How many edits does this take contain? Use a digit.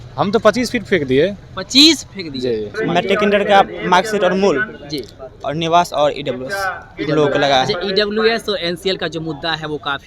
1